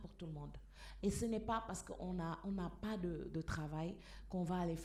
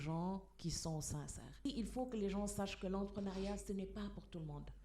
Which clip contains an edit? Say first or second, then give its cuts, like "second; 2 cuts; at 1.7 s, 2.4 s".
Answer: second; 1 cut; at 1.6 s